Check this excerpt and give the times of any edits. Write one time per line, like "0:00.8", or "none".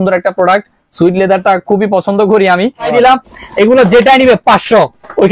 0:02.9